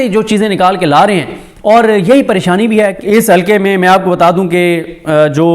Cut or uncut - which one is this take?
cut